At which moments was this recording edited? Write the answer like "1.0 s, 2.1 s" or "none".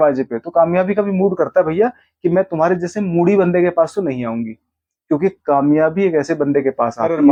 none